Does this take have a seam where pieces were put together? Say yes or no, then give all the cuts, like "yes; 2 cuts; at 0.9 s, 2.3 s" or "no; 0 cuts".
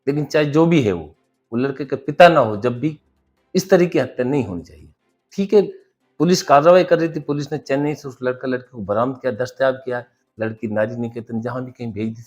no; 0 cuts